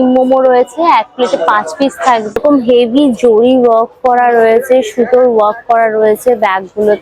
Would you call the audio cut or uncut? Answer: cut